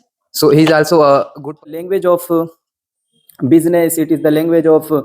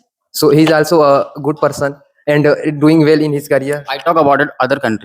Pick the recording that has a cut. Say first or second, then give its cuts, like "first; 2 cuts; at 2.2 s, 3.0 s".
first; 1 cut; at 1.7 s